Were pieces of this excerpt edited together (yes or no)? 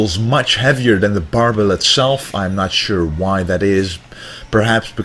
no